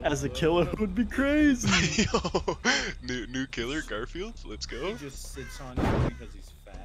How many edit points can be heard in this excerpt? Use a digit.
0